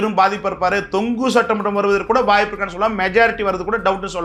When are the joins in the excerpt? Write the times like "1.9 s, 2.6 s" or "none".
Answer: none